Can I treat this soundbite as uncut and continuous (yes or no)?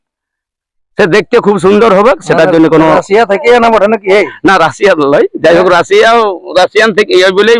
yes